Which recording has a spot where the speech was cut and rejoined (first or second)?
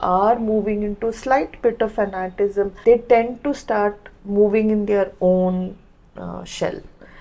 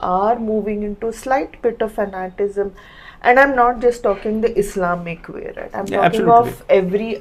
first